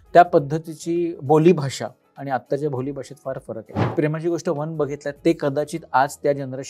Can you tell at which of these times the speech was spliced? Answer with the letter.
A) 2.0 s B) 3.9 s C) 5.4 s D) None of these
B